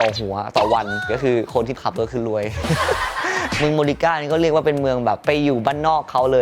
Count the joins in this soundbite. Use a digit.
2